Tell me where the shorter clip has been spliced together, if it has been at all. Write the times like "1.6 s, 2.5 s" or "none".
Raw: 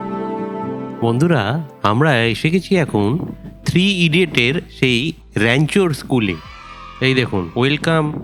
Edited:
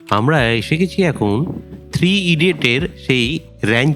none